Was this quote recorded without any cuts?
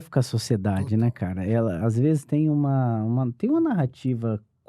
yes; 0 cuts

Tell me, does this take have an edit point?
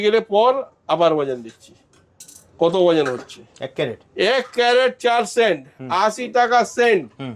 no; 0 cuts

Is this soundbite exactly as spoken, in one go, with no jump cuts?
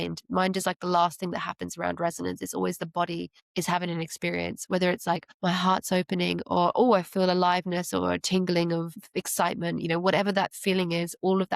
no; 3 cuts; at 3.4 s, 5.3 s, 9.0 s

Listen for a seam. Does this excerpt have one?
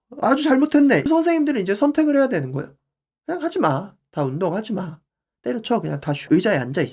yes; 1 cut; at 1.1 s

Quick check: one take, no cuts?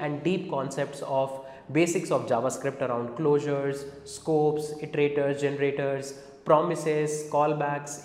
yes; 0 cuts

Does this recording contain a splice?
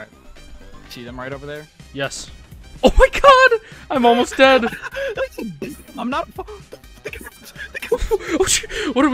no; 0 cuts

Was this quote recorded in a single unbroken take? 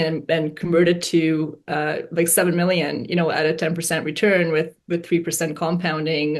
yes; 0 cuts

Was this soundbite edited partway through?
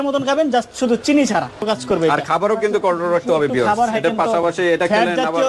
yes; 1 cut; at 1.7 s

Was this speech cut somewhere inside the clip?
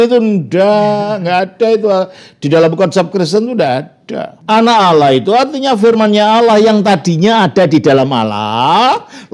yes; 1 cut; at 4.3 s

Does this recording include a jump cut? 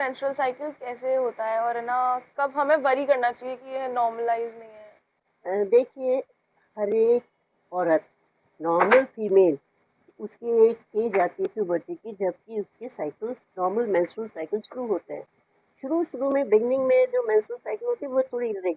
no; 0 cuts

